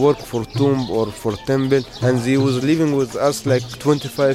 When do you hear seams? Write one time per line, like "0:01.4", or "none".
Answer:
0:01.9